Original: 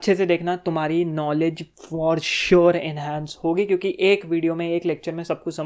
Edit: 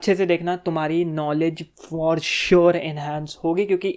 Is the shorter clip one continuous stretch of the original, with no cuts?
yes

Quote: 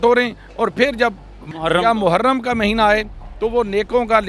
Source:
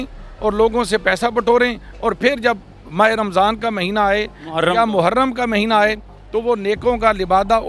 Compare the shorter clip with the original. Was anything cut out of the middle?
yes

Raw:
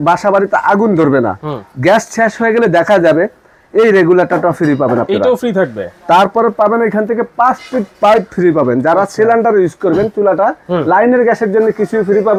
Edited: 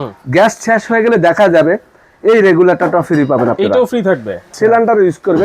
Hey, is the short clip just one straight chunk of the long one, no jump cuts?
no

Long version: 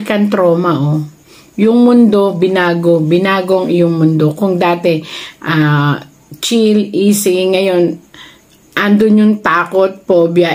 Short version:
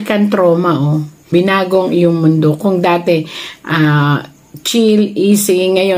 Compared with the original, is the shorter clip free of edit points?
no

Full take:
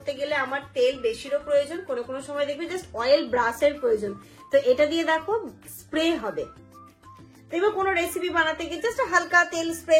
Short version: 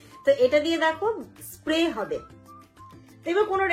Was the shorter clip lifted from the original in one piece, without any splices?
yes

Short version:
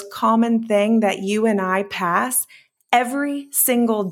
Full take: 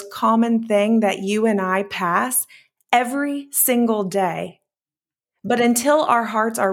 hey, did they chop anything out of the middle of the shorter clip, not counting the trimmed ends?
no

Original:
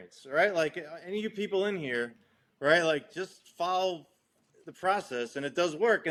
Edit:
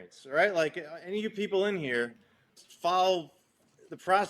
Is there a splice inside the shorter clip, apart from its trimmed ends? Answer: yes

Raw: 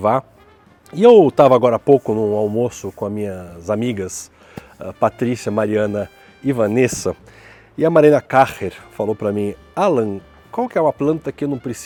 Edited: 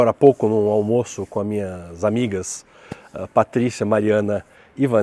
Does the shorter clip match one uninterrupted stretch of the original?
yes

